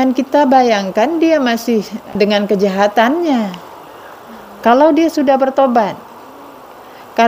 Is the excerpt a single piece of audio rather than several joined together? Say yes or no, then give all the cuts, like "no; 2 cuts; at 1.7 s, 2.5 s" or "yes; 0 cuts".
no; 1 cut; at 2.1 s